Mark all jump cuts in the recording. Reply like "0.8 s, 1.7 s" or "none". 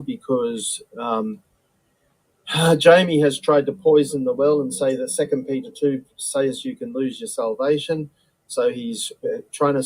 1.1 s